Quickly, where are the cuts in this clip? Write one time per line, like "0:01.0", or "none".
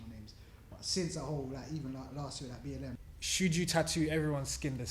0:03.0